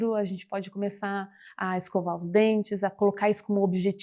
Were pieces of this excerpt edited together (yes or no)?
no